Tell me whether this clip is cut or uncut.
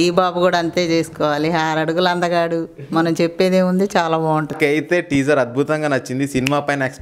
cut